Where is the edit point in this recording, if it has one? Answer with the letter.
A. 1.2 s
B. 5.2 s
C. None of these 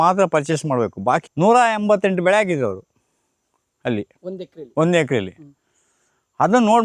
A